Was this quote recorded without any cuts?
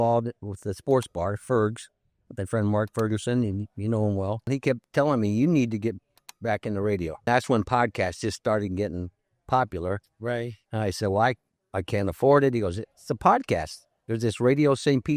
no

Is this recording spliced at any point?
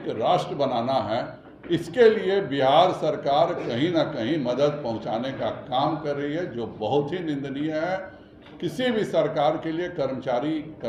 no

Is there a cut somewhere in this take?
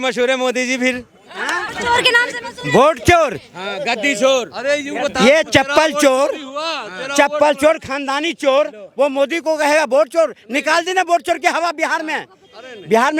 no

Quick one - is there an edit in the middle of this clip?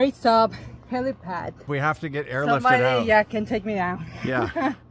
yes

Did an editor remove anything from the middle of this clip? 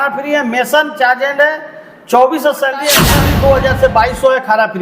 yes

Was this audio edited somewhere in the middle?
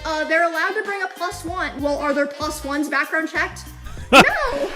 yes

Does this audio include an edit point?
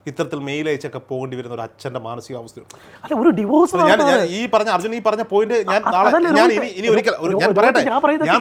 no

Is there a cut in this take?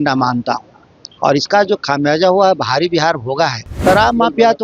yes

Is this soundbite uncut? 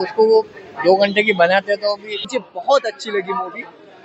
no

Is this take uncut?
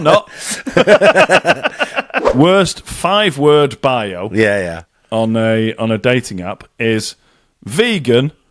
no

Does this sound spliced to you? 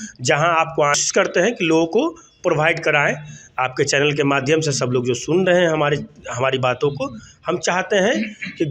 yes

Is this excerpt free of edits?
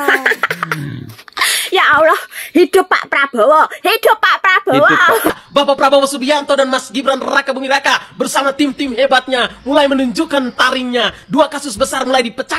no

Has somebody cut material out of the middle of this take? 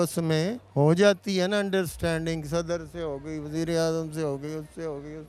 no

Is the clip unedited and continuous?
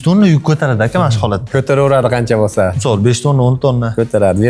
yes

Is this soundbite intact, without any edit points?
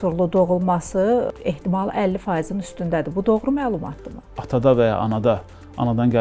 no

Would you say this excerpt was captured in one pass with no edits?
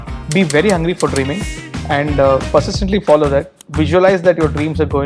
yes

